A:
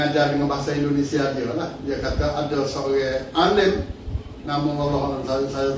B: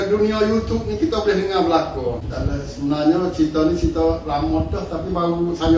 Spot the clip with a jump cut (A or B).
B